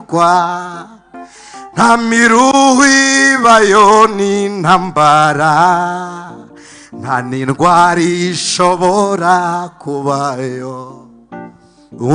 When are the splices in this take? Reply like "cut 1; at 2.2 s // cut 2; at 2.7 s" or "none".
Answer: none